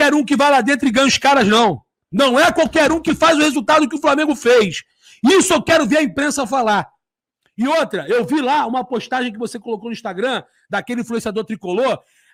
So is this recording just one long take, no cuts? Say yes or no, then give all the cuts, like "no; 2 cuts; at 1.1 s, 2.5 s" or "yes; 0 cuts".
yes; 0 cuts